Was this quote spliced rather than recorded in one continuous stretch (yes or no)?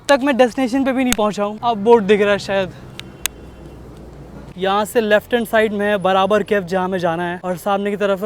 no